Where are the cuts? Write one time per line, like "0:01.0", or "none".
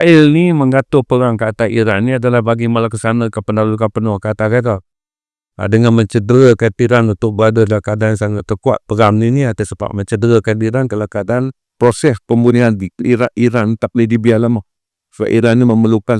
none